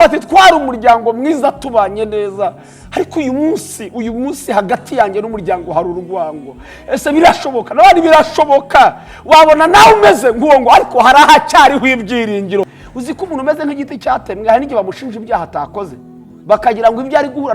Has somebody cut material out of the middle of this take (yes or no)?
yes